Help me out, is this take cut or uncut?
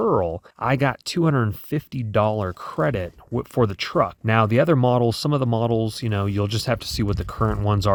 uncut